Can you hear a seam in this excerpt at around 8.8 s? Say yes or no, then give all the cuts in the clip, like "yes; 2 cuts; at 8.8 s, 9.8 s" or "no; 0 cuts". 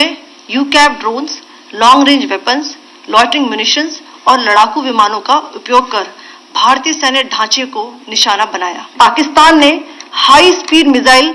yes; 1 cut; at 8.8 s